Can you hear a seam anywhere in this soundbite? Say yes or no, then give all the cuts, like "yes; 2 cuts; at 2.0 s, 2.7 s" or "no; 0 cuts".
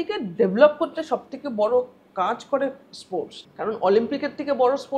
yes; 1 cut; at 3.4 s